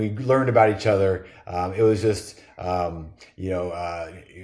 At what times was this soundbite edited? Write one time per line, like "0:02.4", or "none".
none